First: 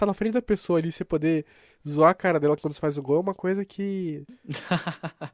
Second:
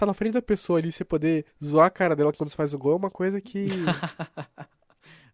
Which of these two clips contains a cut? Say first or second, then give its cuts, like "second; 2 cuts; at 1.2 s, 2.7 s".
second; 2 cuts; at 1.6 s, 3.9 s